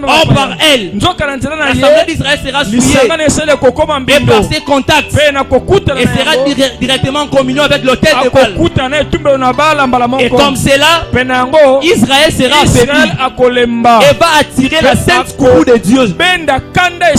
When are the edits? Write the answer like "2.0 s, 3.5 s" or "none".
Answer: none